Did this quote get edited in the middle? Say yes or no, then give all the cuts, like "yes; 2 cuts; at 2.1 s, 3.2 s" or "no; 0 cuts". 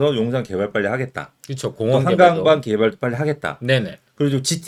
no; 0 cuts